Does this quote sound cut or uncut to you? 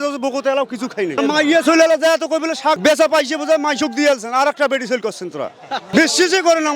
cut